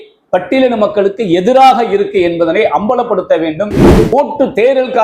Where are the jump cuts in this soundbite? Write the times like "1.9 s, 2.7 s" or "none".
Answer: 4.1 s

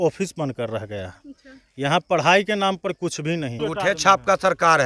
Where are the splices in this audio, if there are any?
3.6 s

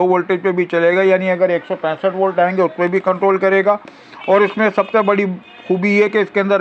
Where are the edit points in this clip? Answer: none

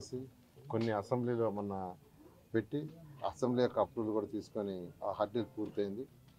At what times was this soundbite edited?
none

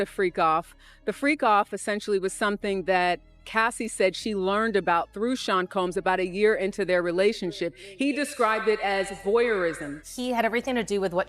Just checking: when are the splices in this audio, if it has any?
10.0 s

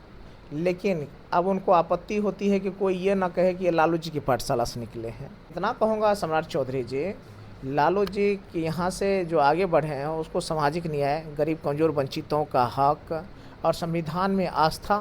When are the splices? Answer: 5.5 s

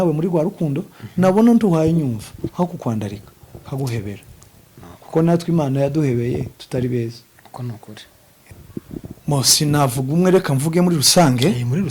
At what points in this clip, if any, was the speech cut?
8.4 s

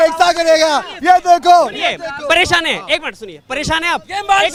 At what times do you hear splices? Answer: none

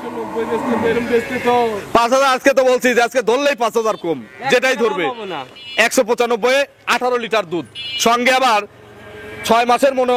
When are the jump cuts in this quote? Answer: none

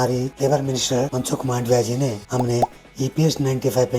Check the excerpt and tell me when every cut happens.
2.2 s

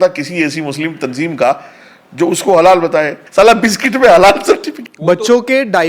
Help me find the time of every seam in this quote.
3.2 s

